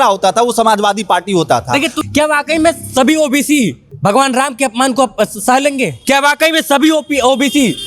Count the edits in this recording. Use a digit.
3